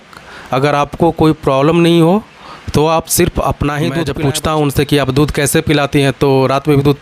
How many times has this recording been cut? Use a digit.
1